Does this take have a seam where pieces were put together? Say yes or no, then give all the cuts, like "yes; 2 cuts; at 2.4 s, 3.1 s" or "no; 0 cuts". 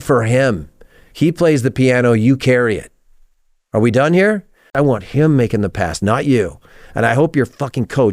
yes; 1 cut; at 4.7 s